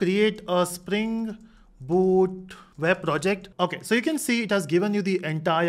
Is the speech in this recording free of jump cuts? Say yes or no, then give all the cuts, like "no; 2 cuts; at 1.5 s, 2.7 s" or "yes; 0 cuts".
no; 1 cut; at 3.5 s